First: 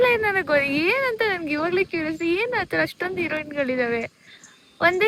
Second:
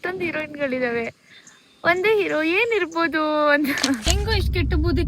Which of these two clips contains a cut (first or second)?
second